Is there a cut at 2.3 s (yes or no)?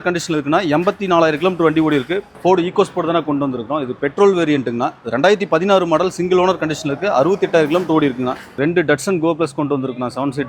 yes